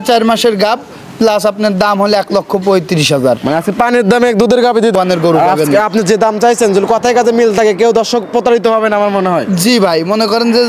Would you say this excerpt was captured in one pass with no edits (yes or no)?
no